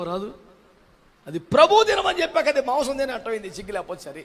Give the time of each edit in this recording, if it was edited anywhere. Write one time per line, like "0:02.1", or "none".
none